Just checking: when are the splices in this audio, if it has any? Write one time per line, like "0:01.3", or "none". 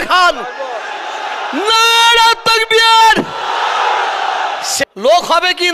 0:04.7